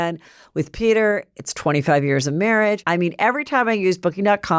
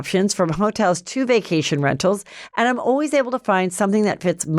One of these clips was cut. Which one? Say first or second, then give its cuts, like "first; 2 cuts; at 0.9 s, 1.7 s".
first; 1 cut; at 2.8 s